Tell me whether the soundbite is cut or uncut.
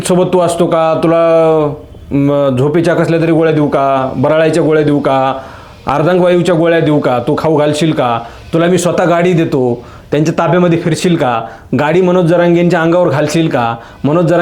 uncut